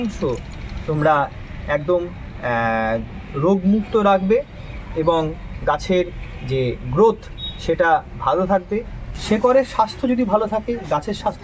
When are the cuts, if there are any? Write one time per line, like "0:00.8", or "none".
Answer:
none